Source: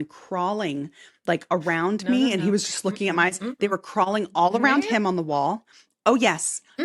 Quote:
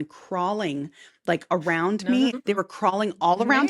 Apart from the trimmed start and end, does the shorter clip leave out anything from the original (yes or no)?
yes